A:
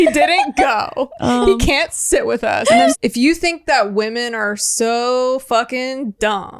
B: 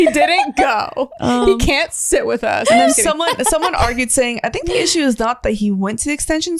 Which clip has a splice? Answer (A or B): A